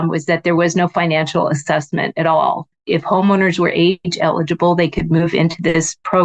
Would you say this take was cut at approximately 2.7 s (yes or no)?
yes